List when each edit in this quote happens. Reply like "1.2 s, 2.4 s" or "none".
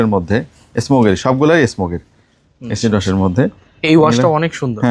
none